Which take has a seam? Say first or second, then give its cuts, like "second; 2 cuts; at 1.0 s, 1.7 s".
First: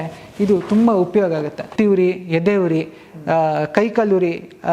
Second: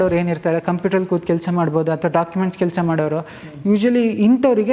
first; 1 cut; at 1.7 s